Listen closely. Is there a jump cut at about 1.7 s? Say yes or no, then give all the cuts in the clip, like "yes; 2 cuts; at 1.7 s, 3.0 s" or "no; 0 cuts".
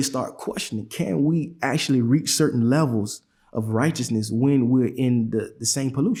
no; 0 cuts